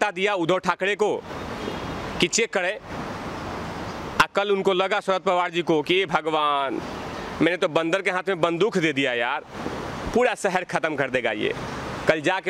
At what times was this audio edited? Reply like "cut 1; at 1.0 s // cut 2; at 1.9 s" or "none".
none